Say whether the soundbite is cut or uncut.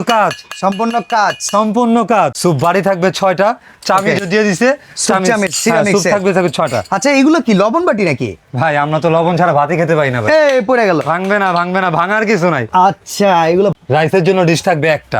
cut